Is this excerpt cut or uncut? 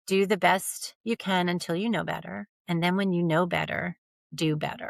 uncut